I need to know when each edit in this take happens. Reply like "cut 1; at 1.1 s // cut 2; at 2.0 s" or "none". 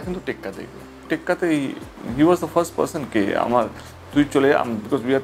cut 1; at 1.1 s

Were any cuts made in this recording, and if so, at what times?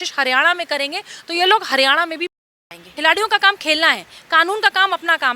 cut 1; at 2.9 s

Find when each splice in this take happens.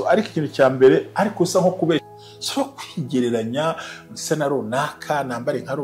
cut 1; at 2.0 s

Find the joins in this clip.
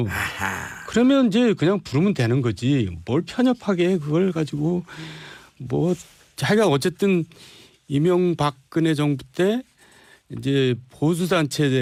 none

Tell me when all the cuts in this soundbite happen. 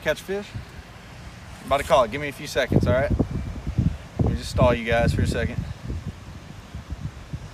none

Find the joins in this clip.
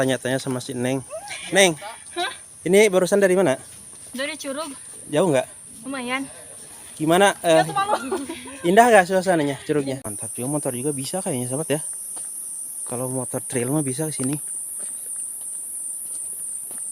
cut 1; at 10.0 s

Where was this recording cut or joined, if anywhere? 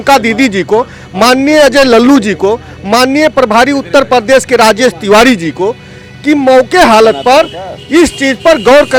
none

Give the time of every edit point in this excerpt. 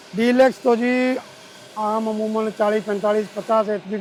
none

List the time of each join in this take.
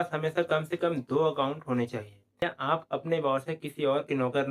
cut 1; at 2.4 s

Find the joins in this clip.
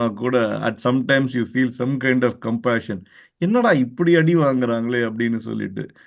none

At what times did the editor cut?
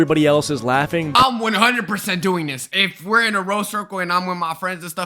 cut 1; at 1.1 s

